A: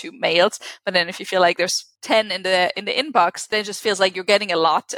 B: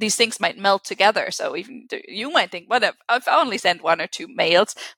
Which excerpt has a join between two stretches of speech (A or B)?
A